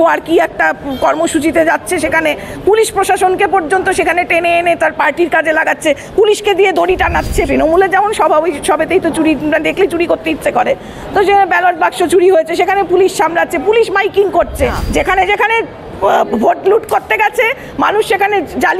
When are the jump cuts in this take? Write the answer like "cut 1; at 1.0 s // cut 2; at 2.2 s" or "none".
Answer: cut 1; at 7.4 s // cut 2; at 14.8 s